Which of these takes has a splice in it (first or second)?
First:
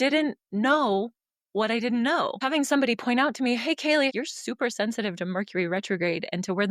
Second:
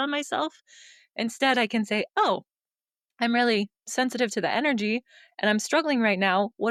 first